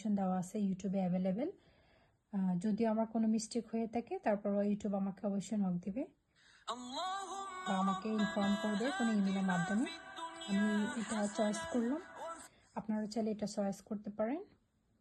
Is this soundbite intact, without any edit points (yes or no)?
yes